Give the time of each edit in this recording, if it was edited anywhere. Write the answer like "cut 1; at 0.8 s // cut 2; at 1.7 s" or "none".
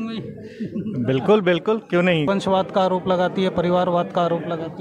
cut 1; at 2.3 s